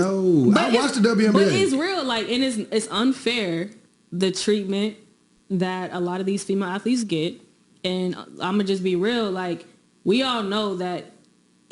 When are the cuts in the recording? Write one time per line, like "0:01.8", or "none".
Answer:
0:00.9
0:05.7
0:06.7